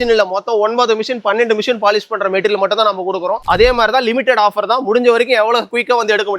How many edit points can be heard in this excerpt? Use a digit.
1